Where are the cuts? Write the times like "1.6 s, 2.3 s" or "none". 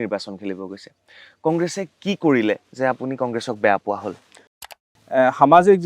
4.8 s